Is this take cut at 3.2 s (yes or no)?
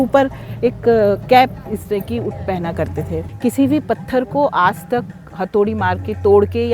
yes